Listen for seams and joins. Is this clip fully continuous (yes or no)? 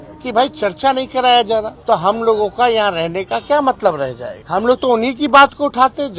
no